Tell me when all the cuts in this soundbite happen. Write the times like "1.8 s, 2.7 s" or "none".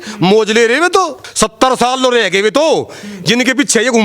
1.2 s